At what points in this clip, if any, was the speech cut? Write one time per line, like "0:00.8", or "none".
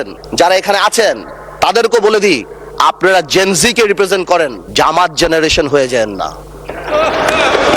none